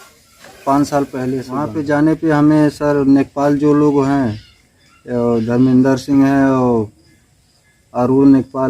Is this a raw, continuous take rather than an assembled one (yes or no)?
no